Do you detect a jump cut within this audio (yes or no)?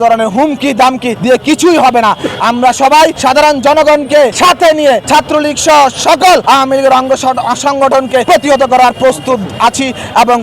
yes